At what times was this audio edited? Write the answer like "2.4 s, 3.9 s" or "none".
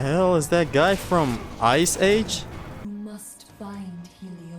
2.8 s